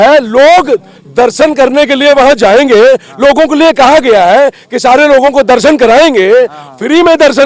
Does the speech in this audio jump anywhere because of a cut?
no; 0 cuts

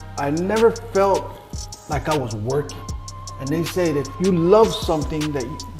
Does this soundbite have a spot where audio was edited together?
no; 0 cuts

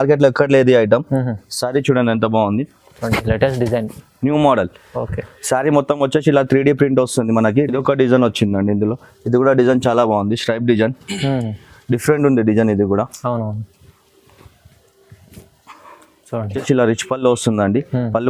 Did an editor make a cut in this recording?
yes; 2 cuts; at 7.7 s, 16.6 s

